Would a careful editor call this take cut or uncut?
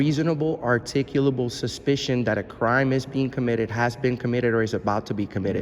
uncut